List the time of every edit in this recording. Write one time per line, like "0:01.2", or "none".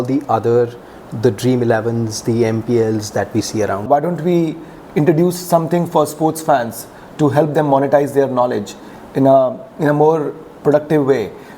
0:03.9